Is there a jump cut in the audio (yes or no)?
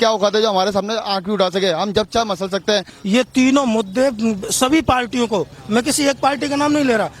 yes